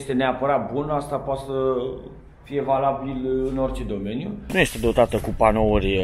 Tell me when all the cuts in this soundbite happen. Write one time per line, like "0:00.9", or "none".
0:04.5